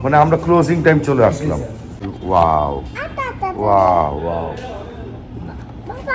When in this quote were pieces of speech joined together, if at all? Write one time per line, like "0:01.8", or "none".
0:02.1